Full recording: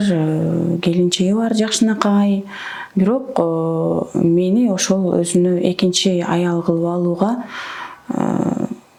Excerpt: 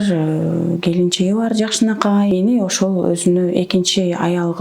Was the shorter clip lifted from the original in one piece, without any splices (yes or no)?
no